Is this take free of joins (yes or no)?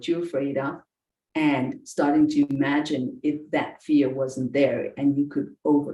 yes